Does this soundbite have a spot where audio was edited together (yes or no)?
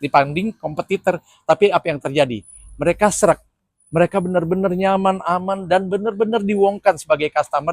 no